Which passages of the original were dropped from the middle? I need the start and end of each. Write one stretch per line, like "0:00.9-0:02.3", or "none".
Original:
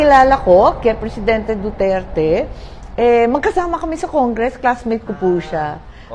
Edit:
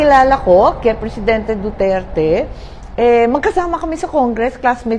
none